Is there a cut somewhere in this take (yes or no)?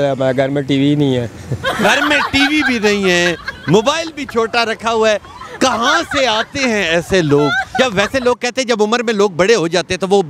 no